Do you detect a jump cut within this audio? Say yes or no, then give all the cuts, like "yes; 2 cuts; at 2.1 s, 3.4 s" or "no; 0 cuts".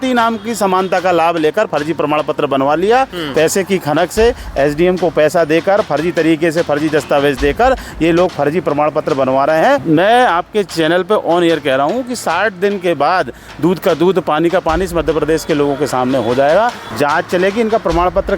yes; 3 cuts; at 3.2 s, 9.8 s, 16.8 s